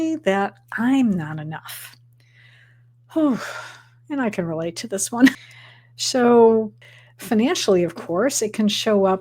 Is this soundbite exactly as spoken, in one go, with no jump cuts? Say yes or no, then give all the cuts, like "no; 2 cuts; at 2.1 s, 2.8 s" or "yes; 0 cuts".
no; 2 cuts; at 5.4 s, 6.9 s